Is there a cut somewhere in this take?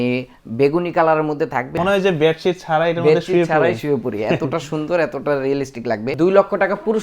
yes; 2 cuts; at 1.7 s, 6.1 s

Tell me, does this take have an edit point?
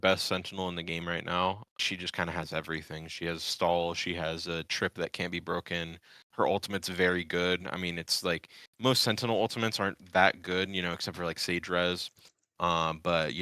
yes; 1 cut; at 1.8 s

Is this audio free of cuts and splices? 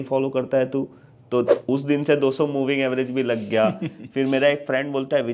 yes; 0 cuts

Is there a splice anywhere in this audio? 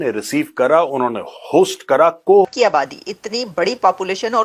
yes; 1 cut; at 2.5 s

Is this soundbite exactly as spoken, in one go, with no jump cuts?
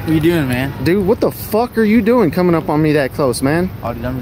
yes; 0 cuts

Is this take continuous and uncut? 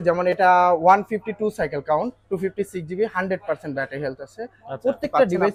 yes; 0 cuts

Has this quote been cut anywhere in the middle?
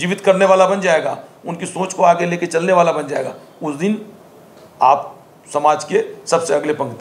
no; 0 cuts

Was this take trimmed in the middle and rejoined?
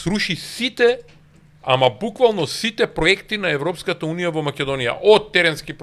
no; 0 cuts

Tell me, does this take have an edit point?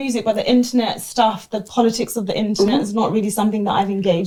no; 0 cuts

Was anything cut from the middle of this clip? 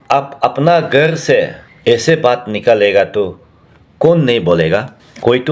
no; 0 cuts

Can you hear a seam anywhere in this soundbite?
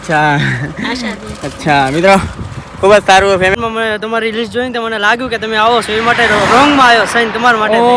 yes; 1 cut; at 3.5 s

